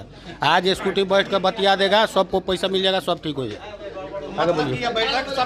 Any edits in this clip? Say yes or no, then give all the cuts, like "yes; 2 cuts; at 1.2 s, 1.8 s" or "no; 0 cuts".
no; 0 cuts